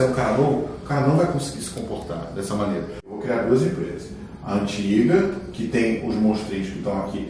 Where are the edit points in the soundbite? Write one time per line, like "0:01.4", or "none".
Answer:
0:03.1